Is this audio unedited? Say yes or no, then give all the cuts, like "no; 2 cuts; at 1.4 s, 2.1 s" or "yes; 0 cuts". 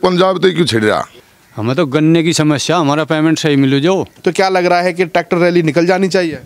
no; 2 cuts; at 1.1 s, 4.1 s